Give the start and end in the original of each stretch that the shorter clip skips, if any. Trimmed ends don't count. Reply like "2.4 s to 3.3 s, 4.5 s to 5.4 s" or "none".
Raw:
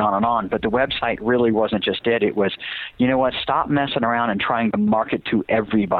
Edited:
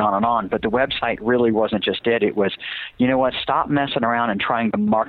none